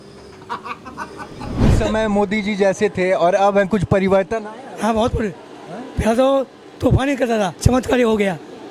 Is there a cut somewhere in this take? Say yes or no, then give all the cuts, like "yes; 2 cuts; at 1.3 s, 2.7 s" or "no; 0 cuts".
yes; 2 cuts; at 1.7 s, 7.6 s